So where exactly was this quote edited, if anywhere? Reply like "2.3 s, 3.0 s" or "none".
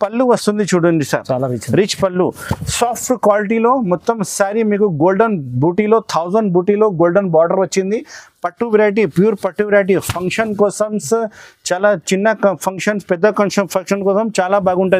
none